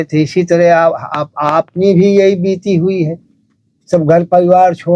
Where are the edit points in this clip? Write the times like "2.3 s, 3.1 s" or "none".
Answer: none